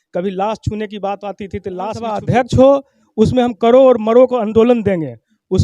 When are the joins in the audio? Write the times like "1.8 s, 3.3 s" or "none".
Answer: 2.2 s